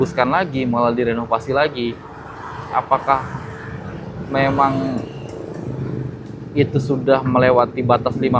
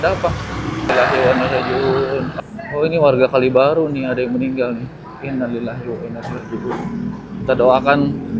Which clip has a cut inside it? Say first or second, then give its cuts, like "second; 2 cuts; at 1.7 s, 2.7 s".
second; 2 cuts; at 0.9 s, 2.3 s